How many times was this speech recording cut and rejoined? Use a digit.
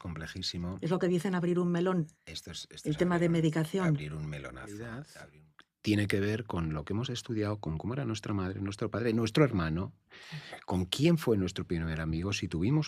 1